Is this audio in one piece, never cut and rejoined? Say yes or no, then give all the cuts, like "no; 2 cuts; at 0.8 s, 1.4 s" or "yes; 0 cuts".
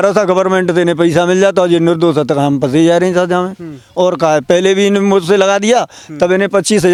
yes; 0 cuts